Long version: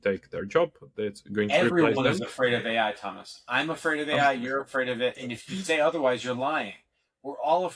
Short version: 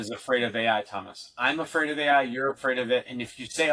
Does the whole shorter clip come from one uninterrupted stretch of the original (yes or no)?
yes